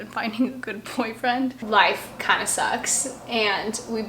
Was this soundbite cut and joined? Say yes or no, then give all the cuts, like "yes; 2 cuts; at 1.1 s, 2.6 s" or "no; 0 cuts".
yes; 1 cut; at 1.6 s